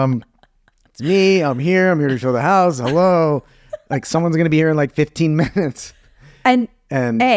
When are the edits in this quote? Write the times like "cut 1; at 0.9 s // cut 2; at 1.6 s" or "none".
none

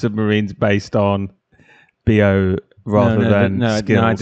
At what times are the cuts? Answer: none

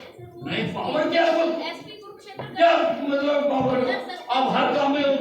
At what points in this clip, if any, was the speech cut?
none

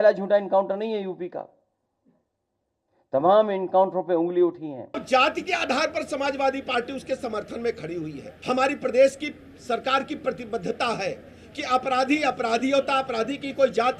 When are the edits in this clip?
cut 1; at 5.0 s // cut 2; at 8.3 s

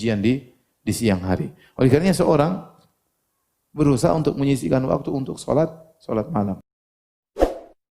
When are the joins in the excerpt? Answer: cut 1; at 6.6 s

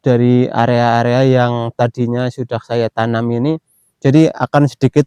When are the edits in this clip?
none

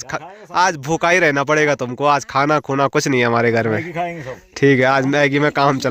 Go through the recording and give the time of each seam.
none

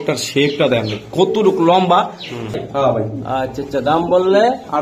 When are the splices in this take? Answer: cut 1; at 2.6 s

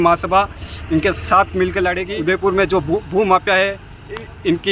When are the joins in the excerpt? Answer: cut 1; at 2.1 s

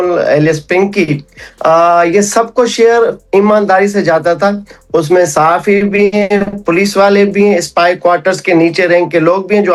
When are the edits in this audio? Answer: none

